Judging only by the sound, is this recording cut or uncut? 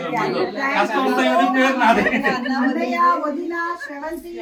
uncut